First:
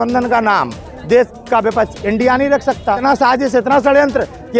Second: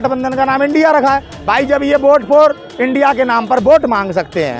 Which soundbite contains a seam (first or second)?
first